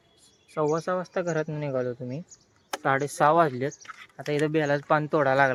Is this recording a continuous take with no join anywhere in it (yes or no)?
yes